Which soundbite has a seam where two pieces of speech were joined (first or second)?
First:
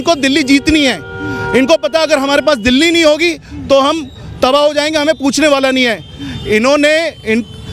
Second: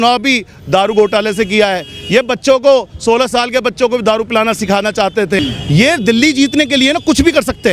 second